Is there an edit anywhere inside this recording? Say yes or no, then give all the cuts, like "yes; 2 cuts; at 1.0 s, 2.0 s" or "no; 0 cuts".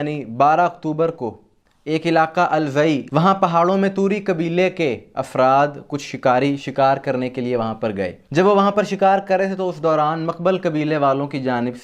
no; 0 cuts